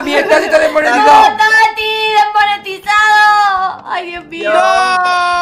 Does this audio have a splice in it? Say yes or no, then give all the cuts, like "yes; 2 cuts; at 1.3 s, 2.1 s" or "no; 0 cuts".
no; 0 cuts